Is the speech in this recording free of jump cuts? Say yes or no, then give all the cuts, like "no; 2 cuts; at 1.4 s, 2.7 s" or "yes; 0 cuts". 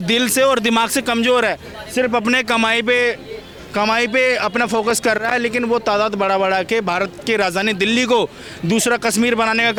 yes; 0 cuts